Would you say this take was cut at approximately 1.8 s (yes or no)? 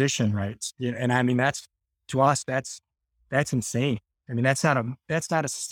no